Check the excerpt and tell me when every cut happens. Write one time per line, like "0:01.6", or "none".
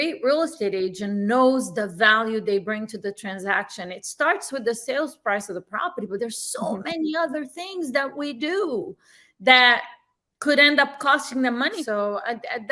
0:11.8